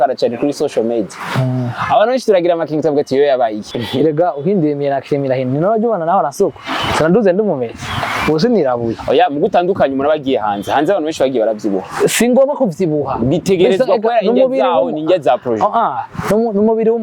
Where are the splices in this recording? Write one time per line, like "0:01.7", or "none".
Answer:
0:03.6